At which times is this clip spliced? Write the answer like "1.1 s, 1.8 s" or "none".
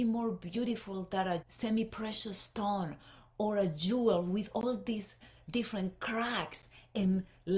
1.5 s